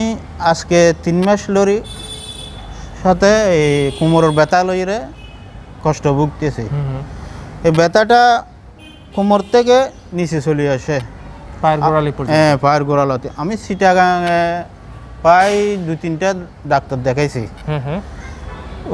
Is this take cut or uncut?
uncut